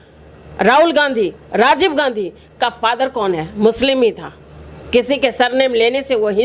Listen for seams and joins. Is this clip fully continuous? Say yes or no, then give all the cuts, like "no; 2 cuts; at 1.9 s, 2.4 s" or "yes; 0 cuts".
yes; 0 cuts